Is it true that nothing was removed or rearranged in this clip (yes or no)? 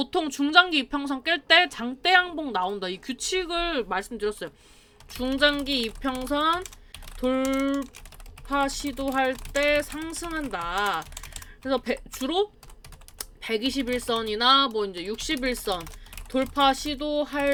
yes